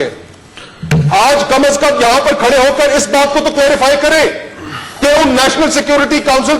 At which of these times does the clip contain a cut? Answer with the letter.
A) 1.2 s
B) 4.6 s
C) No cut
C